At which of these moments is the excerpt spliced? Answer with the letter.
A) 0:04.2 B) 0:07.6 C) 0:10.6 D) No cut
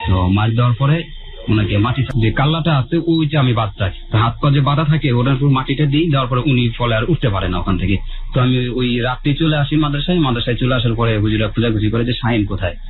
D